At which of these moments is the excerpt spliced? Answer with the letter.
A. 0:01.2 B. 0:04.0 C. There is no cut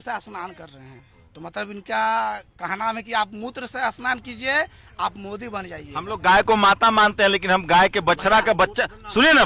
A